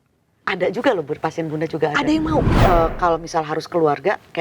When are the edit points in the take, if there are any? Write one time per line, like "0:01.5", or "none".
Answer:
0:02.5

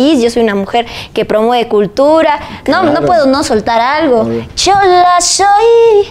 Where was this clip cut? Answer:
0:04.4

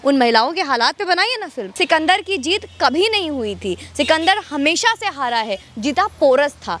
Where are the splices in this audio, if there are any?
0:01.6

